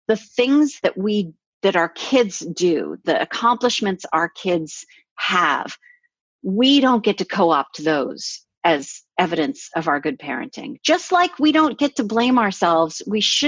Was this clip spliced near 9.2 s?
no; 2 cuts; at 1.1 s, 3.0 s

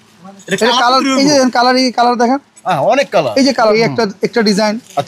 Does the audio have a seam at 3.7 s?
yes; 1 cut; at 3.7 s

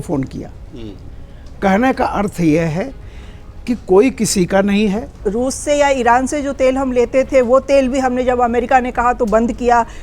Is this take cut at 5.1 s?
yes; 1 cut; at 5.1 s

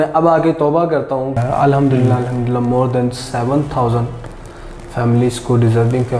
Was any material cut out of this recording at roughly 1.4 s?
yes; 1 cut; at 1.4 s

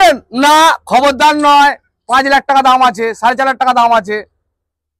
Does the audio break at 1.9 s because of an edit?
no; 0 cuts

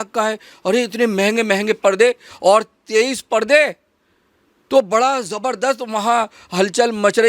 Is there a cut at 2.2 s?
no; 0 cuts

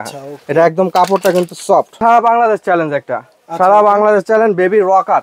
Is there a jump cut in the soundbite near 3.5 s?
no; 1 cut; at 2.0 s

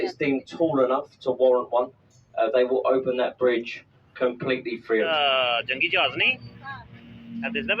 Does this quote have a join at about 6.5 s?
no; 1 cut; at 5.1 s

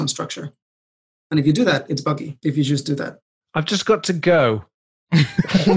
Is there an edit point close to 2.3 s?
yes; 1 cut; at 2.3 s

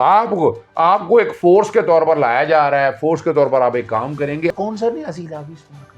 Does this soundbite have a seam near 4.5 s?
yes; 1 cut; at 4.5 s

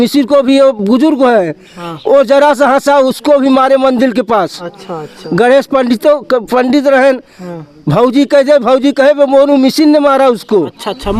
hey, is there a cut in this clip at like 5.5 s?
no; 0 cuts

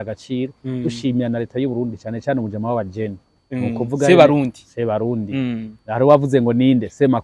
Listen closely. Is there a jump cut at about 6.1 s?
no; 0 cuts

